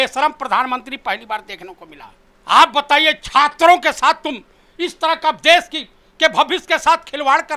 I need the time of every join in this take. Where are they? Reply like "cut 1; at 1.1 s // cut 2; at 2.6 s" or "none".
none